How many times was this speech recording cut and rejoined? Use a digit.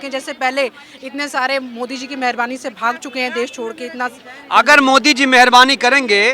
0